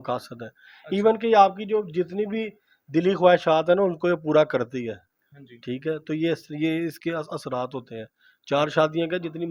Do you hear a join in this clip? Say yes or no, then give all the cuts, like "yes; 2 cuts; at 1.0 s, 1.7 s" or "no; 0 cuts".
no; 0 cuts